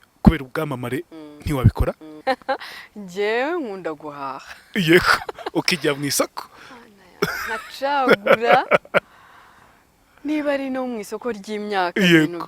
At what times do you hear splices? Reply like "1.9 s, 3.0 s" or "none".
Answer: 2.1 s